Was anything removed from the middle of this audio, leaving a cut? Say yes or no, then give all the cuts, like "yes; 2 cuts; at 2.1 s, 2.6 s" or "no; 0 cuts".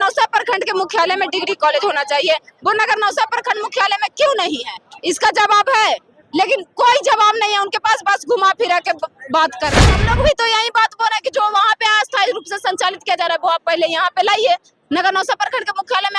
yes; 1 cut; at 10.0 s